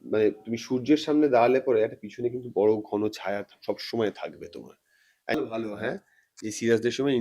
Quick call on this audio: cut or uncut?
cut